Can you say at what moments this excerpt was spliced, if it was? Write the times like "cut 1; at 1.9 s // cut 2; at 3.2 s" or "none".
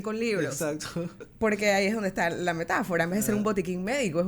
cut 1; at 1.2 s